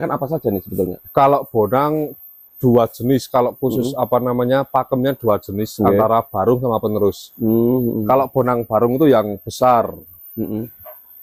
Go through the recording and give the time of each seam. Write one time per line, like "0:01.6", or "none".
none